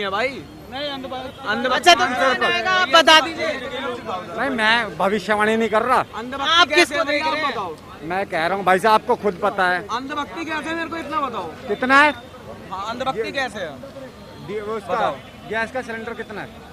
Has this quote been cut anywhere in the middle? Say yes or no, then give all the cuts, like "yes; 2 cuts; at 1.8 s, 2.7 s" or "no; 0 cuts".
no; 0 cuts